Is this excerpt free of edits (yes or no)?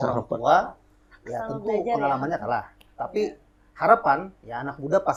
yes